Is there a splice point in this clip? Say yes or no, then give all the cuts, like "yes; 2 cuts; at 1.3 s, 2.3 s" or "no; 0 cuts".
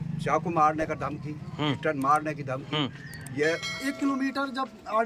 yes; 1 cut; at 3.8 s